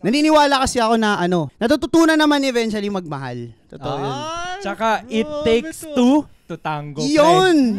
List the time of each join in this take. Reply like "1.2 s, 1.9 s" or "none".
1.5 s